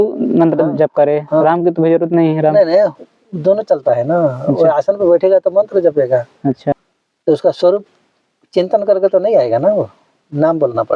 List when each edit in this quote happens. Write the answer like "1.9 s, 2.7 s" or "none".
6.8 s

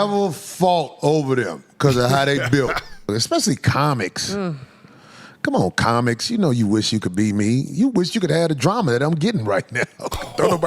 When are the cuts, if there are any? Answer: 3.1 s

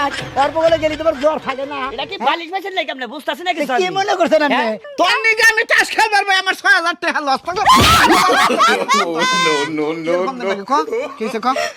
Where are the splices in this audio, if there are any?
4.7 s

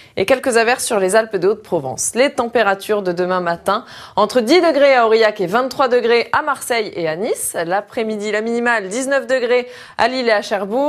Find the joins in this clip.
6.3 s

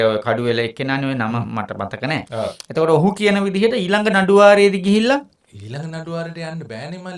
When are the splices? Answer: none

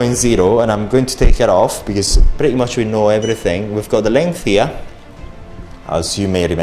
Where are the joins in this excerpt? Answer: none

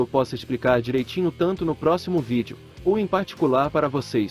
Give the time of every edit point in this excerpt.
none

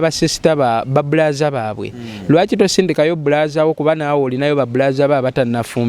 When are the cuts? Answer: none

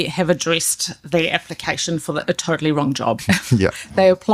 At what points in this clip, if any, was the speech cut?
3.2 s

